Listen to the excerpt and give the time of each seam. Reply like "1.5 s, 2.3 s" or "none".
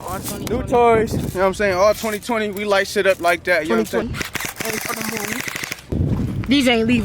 4.0 s, 5.9 s